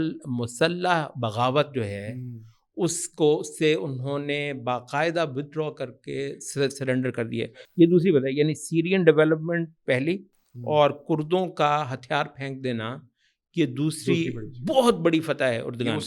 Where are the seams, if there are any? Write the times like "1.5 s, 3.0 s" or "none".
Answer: none